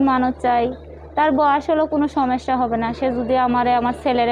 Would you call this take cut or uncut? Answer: uncut